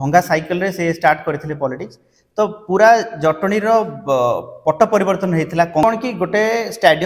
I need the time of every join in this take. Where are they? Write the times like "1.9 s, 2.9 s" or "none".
5.8 s